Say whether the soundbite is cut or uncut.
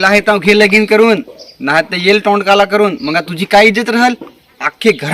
uncut